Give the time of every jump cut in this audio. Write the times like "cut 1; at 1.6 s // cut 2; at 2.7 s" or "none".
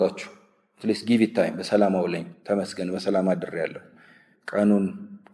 none